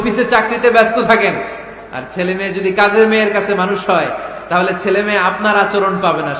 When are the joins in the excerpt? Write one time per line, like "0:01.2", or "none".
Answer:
none